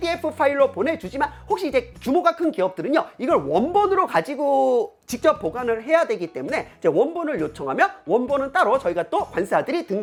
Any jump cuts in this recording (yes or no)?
no